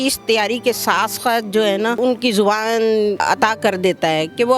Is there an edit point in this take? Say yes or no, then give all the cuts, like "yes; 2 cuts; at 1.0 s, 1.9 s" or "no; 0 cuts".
yes; 2 cuts; at 2.0 s, 3.2 s